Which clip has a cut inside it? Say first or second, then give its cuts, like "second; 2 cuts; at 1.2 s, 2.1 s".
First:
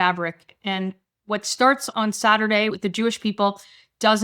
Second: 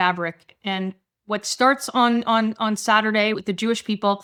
first; 1 cut; at 1.9 s